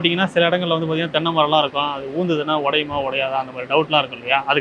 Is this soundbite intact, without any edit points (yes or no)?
yes